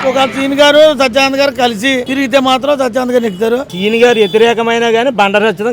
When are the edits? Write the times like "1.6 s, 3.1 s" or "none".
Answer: 2.1 s, 3.7 s